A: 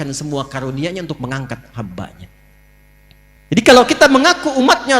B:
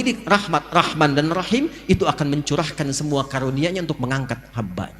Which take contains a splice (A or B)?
A